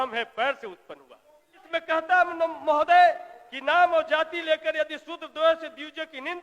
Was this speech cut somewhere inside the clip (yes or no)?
yes